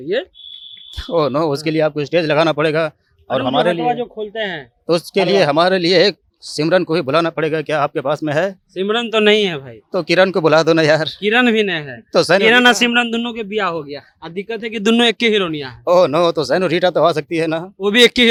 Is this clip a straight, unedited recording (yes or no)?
yes